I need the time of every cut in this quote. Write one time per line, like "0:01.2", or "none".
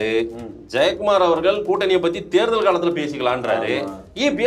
none

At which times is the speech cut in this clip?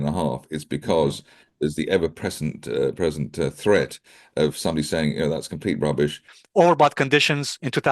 0:06.3

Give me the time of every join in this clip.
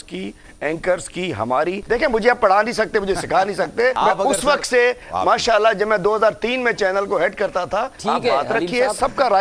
0:01.8
0:04.0
0:07.9

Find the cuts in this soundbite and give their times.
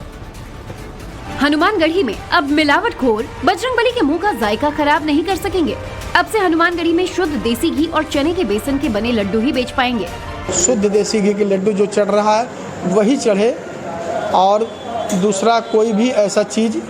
none

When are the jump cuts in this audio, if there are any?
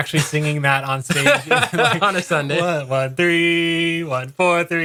none

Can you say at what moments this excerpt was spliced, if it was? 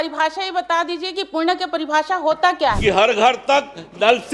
0:02.8

